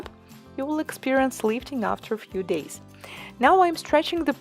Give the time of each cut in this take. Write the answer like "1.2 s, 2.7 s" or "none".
none